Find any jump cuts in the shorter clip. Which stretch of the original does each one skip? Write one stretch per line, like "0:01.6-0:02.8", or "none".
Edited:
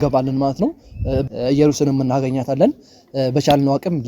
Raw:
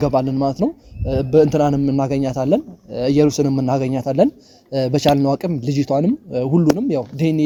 0:01.2-0:02.8